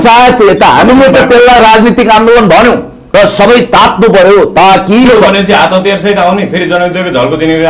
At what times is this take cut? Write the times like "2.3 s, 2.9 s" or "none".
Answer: 3.0 s